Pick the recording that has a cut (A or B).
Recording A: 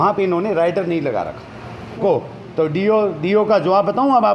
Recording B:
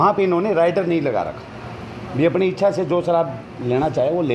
A